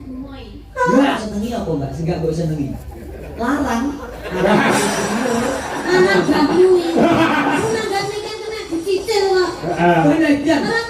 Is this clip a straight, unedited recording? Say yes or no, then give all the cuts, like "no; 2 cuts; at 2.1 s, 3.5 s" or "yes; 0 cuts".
no; 1 cut; at 1.2 s